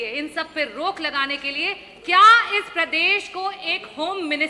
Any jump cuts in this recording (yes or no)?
no